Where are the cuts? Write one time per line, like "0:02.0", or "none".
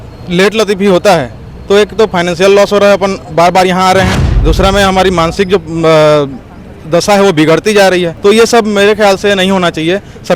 0:04.3
0:08.1